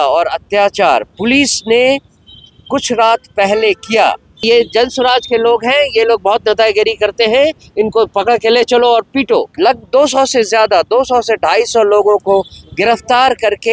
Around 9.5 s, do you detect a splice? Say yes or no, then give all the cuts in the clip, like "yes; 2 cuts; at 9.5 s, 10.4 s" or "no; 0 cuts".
yes; 2 cuts; at 4.4 s, 9.5 s